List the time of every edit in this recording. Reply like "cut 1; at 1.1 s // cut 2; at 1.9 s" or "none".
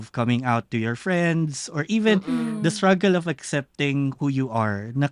none